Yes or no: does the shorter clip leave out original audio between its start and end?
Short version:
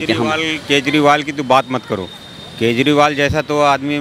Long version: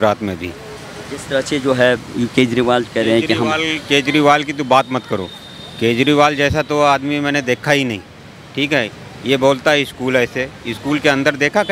no